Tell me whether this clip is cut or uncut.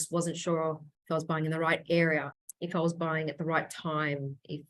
cut